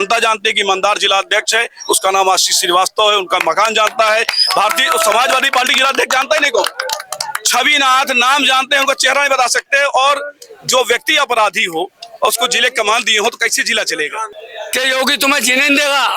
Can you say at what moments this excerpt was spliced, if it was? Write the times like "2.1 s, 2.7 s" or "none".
14.3 s